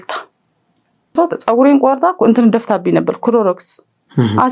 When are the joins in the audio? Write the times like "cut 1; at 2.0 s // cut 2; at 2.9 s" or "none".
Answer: cut 1; at 1.1 s